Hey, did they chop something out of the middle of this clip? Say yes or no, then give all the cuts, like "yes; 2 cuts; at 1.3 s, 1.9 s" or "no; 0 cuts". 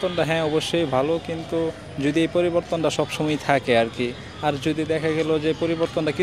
no; 0 cuts